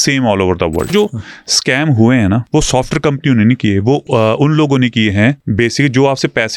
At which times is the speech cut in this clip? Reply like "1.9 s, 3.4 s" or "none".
0.9 s, 2.4 s, 4.0 s, 5.4 s